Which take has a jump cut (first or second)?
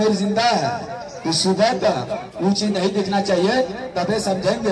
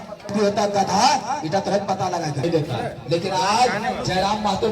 second